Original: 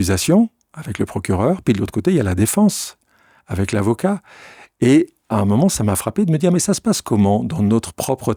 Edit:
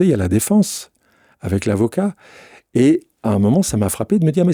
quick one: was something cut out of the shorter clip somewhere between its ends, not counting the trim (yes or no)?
no